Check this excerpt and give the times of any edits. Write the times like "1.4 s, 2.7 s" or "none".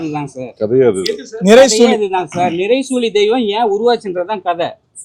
none